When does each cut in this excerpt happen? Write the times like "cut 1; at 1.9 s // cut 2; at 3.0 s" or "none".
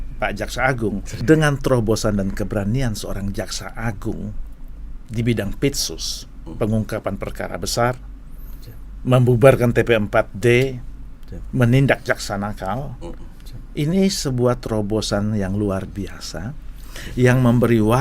cut 1; at 1.1 s